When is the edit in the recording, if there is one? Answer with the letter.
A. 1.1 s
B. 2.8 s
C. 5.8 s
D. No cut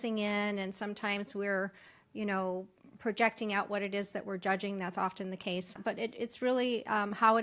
C